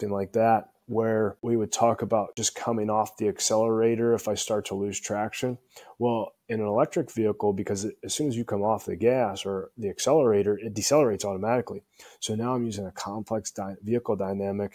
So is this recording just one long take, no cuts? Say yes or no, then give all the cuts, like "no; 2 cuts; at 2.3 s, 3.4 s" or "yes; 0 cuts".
no; 2 cuts; at 1.4 s, 2.4 s